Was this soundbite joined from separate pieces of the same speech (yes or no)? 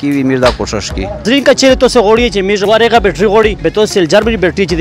yes